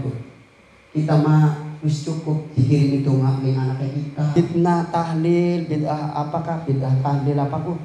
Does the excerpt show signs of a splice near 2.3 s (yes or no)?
no